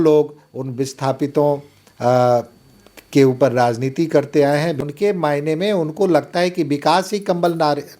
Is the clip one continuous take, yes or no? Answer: no